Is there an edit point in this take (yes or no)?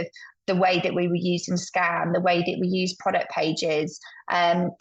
no